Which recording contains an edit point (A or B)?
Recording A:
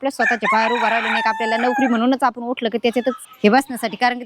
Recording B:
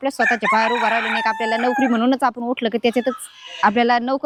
A